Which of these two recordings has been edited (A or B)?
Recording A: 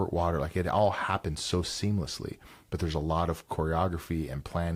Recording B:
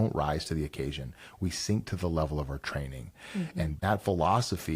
B